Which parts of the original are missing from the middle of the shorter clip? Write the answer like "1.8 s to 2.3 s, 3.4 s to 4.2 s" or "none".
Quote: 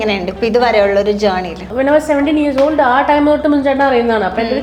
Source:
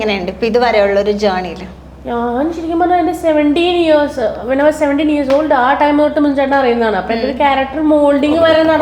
1.7 s to 4.4 s